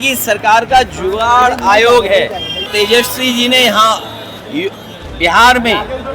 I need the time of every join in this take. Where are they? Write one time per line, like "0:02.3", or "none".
0:02.6